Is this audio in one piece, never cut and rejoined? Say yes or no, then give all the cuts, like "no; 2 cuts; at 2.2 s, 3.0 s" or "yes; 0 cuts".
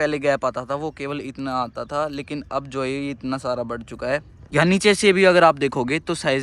no; 1 cut; at 4.4 s